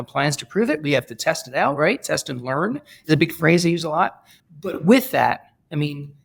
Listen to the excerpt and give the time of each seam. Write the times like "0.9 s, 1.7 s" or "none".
none